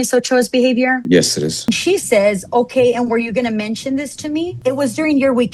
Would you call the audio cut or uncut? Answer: cut